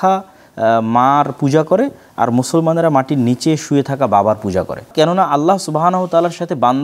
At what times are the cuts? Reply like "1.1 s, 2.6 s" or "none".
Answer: 4.9 s